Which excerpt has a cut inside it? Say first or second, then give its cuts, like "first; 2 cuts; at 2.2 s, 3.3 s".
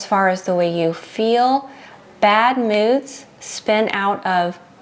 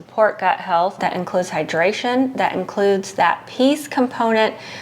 second; 1 cut; at 1.0 s